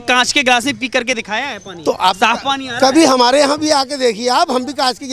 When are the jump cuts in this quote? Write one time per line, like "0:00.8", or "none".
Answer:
none